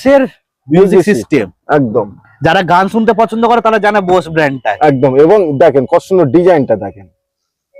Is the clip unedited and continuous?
yes; 0 cuts

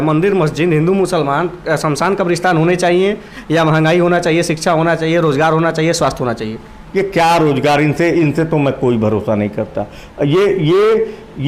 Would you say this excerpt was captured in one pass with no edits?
yes; 0 cuts

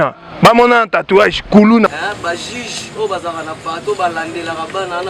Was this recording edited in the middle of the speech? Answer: yes; 1 cut; at 1.9 s

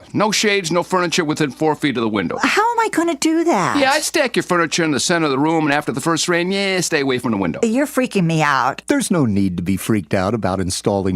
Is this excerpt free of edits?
yes; 0 cuts

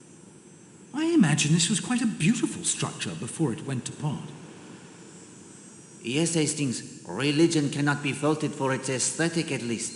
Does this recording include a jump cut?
yes; 3 cuts; at 0.9 s, 4.3 s, 6.0 s

